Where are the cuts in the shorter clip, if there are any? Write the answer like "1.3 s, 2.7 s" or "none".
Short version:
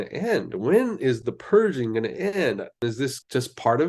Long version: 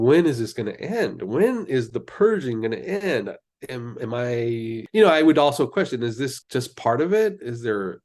2.8 s